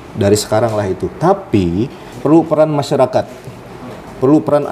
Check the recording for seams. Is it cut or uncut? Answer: cut